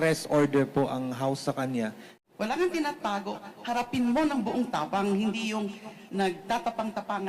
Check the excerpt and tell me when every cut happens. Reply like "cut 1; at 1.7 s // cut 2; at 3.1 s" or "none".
cut 1; at 2.2 s